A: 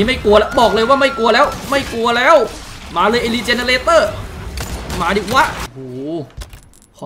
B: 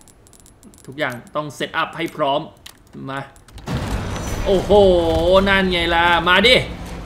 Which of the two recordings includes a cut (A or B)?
A